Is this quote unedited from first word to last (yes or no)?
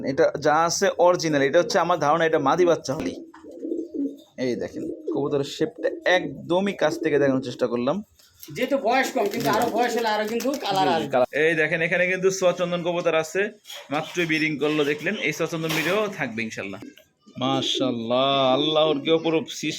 no